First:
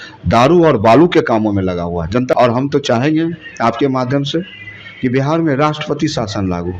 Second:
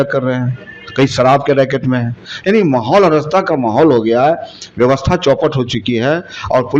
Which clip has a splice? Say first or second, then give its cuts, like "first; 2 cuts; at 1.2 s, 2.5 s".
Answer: first; 1 cut; at 2.3 s